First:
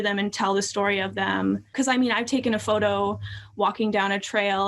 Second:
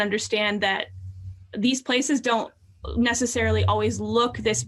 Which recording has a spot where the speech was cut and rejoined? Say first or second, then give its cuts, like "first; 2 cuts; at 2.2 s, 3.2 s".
first; 1 cut; at 1.7 s